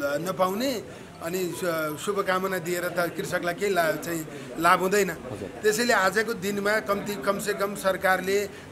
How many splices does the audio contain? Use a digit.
0